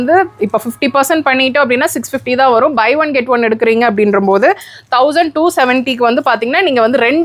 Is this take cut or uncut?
uncut